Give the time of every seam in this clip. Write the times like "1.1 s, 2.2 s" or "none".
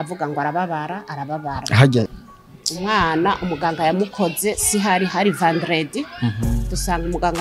2.1 s